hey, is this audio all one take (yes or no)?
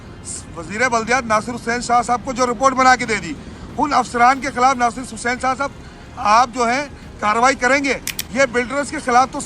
yes